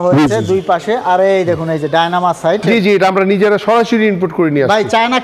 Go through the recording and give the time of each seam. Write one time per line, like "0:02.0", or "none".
0:02.6